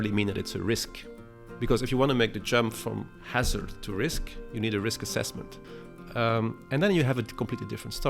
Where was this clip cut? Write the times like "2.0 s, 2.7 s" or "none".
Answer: 5.6 s